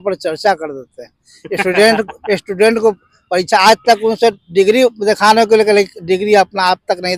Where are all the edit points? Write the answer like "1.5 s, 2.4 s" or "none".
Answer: none